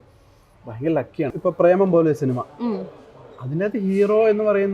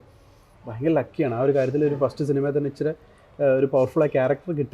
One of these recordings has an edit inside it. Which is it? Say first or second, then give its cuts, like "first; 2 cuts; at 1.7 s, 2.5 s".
first; 1 cut; at 1.3 s